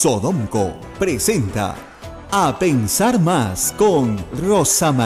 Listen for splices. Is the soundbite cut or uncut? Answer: uncut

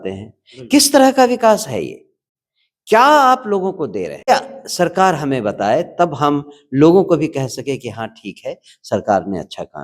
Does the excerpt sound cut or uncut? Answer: cut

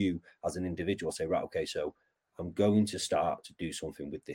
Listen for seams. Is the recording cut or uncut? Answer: uncut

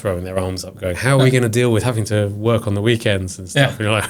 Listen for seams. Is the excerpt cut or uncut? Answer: uncut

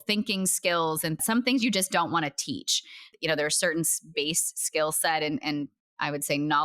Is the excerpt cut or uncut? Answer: cut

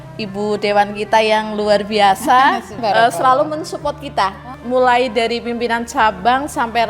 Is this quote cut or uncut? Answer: cut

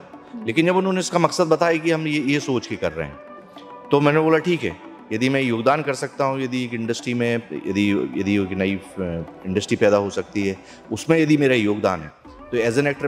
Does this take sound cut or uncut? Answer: uncut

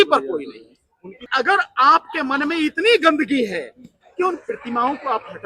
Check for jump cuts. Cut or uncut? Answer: cut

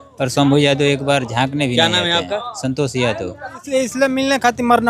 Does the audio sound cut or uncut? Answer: cut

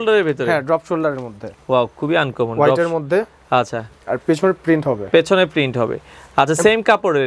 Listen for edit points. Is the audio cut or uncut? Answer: uncut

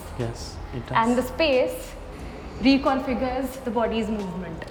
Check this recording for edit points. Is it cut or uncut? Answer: uncut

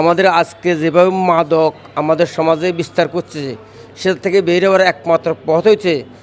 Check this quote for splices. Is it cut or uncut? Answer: uncut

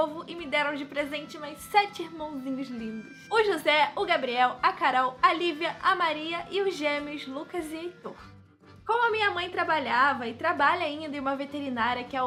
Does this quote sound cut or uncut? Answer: uncut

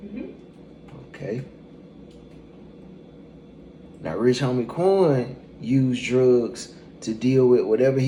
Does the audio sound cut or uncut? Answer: uncut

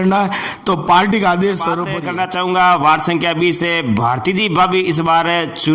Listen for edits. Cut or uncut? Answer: cut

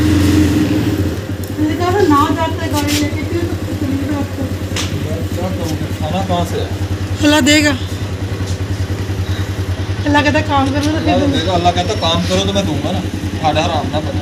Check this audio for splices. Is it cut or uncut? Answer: uncut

